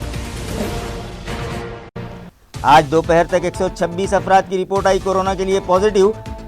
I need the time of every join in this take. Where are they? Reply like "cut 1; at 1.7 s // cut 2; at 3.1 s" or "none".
cut 1; at 1.1 s